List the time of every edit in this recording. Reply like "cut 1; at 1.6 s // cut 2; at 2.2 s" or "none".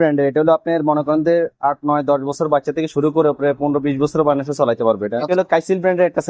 cut 1; at 5.3 s

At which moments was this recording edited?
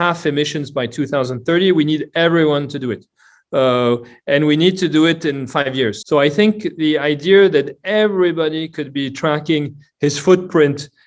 cut 1; at 6.0 s

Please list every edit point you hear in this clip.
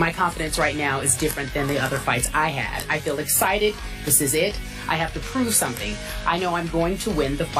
none

